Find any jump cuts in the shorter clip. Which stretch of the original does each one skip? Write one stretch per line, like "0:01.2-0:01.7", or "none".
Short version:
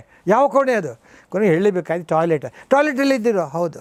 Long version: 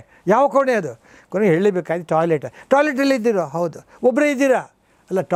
none